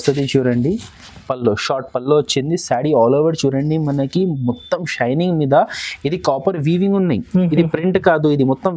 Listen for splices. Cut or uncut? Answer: uncut